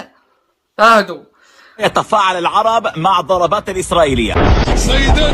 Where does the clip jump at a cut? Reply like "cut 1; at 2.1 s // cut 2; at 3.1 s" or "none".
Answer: cut 1; at 1.8 s